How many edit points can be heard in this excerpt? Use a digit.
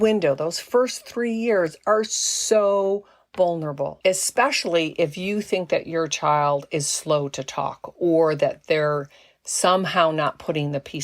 1